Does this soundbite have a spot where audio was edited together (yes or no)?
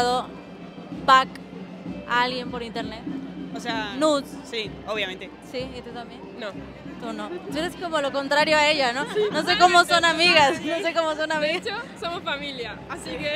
no